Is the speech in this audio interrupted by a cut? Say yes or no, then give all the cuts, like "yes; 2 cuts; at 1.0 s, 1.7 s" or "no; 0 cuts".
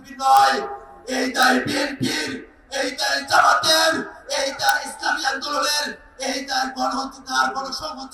no; 0 cuts